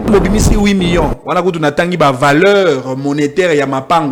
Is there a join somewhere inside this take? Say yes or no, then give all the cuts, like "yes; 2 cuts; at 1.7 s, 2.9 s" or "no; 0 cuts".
no; 0 cuts